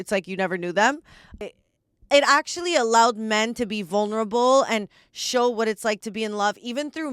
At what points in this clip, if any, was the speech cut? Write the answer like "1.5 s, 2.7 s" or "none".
1.4 s